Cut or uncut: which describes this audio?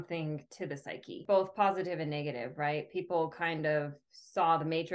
cut